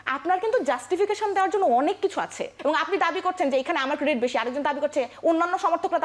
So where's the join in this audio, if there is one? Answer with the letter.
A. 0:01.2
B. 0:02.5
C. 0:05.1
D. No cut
B